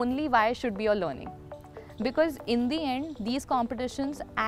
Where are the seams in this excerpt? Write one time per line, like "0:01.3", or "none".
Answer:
none